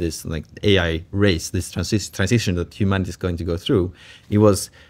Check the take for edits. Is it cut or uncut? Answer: uncut